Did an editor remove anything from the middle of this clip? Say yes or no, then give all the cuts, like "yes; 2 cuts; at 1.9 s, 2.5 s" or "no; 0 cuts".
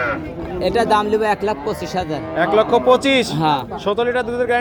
no; 0 cuts